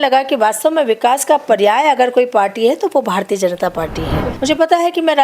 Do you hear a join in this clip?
yes; 1 cut; at 4.2 s

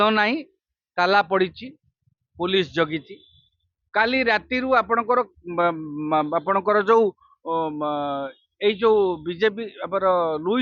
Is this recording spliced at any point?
no; 0 cuts

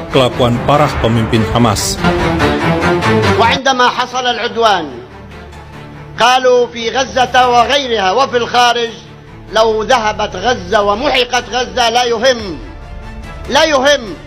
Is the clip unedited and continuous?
yes; 0 cuts

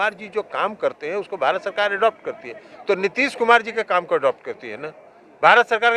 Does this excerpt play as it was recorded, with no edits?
yes; 0 cuts

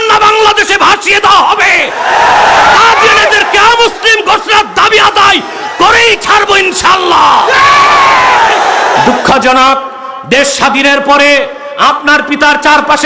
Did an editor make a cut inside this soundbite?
yes; 1 cut; at 9.0 s

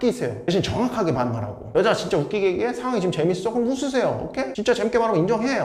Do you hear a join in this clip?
no; 0 cuts

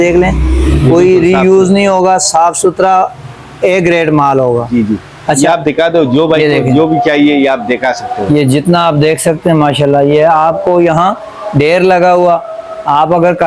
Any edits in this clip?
no; 0 cuts

